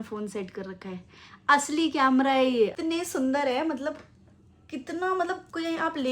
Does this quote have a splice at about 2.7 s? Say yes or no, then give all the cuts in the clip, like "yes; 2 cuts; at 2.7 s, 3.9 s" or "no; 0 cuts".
yes; 1 cut; at 2.7 s